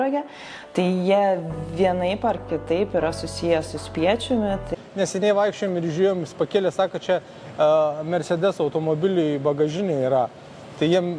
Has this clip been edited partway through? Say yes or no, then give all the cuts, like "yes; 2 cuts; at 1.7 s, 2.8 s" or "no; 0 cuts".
yes; 1 cut; at 4.7 s